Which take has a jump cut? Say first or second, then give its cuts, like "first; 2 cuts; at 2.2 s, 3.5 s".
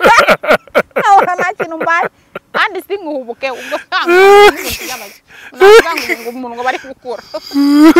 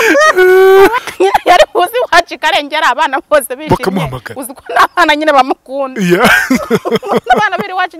second; 1 cut; at 1.0 s